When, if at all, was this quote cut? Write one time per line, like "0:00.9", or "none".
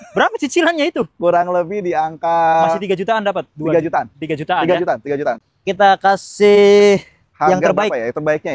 0:05.4